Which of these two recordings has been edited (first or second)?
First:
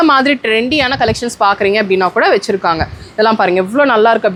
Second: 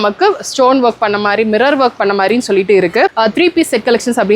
second